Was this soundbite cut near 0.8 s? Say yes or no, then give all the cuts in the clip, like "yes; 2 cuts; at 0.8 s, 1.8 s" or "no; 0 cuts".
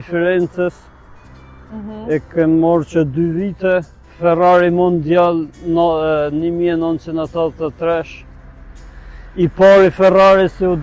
no; 0 cuts